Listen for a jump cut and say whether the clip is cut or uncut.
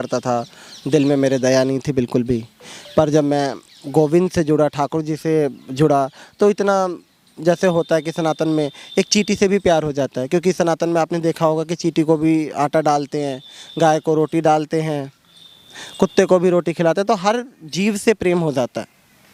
uncut